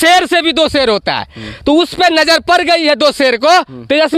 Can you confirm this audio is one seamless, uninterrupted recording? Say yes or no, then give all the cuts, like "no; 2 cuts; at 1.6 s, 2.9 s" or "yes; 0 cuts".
yes; 0 cuts